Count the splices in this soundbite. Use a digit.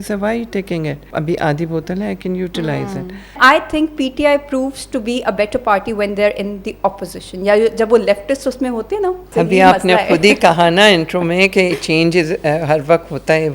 3